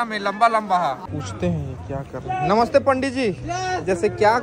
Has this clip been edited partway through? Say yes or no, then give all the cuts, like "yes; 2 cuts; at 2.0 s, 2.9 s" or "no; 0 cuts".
yes; 1 cut; at 1.1 s